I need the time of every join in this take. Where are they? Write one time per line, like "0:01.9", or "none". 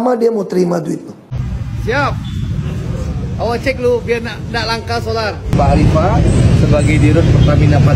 0:05.5